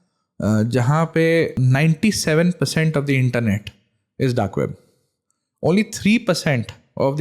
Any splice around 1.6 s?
yes; 1 cut; at 1.6 s

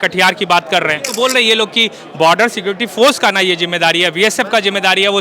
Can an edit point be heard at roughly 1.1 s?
yes; 1 cut; at 1.1 s

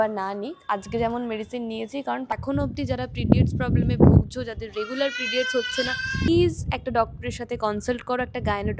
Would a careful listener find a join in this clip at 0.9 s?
no; 2 cuts; at 2.3 s, 6.3 s

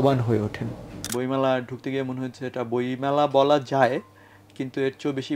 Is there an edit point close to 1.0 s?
yes; 1 cut; at 1.0 s

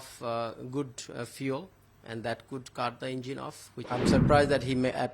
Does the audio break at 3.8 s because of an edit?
yes; 1 cut; at 3.8 s

